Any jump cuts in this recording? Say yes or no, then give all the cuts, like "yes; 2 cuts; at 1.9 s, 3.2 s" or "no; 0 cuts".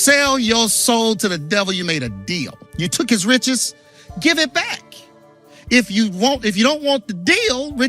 yes; 1 cut; at 2.6 s